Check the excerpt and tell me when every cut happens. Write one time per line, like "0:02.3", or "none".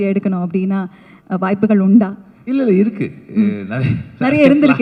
none

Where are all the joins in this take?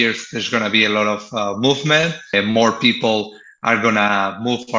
0:02.3

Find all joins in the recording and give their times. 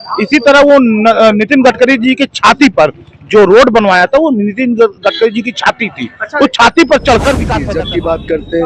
0:07.5

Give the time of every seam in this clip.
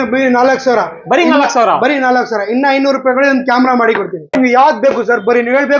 0:04.3

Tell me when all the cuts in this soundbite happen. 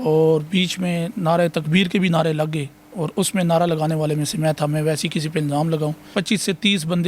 0:06.1

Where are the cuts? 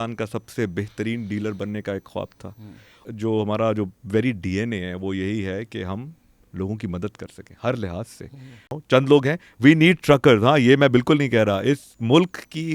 0:03.0
0:08.7

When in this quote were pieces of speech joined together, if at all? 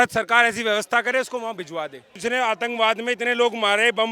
0:02.2

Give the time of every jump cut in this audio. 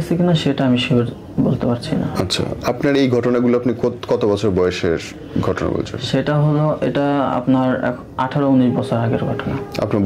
none

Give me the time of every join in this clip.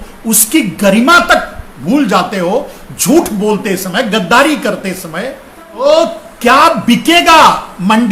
0:05.8

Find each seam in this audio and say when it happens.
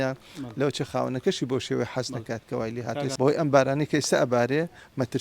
0:03.1

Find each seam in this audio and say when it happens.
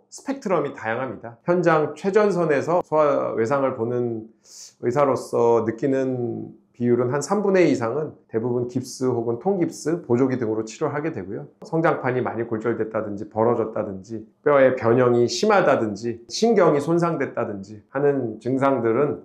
0:01.3

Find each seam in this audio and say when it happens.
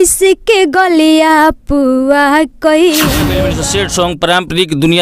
0:03.5

